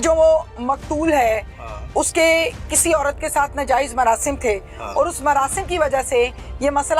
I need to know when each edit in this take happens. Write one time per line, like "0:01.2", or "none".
none